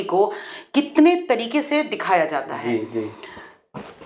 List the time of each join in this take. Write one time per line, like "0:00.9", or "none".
none